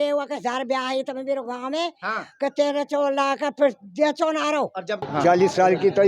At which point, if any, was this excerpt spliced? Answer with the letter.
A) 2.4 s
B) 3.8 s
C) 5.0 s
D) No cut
C